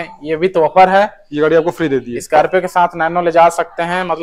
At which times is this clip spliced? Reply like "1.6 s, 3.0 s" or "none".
none